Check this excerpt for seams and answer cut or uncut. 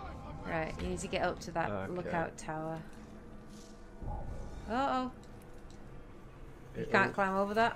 cut